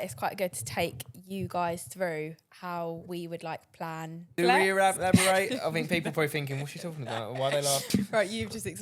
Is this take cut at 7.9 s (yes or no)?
yes